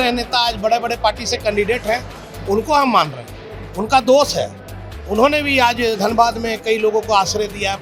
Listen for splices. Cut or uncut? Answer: uncut